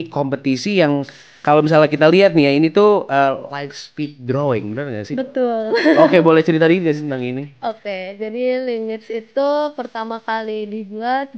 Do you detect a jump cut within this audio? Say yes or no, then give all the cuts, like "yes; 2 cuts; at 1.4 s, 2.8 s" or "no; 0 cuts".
no; 0 cuts